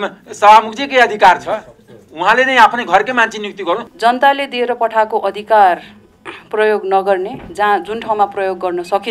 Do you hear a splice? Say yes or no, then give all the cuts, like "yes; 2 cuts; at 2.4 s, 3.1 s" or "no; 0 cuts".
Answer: yes; 1 cut; at 3.9 s